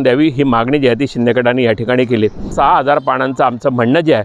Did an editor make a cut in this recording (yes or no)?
yes